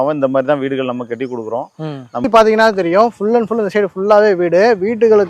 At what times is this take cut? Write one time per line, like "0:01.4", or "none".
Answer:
0:02.2